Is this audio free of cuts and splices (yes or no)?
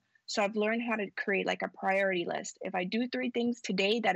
yes